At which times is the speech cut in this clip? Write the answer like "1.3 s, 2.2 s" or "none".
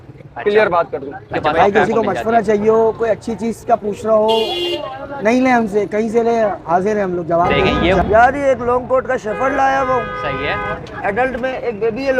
1.4 s, 8.0 s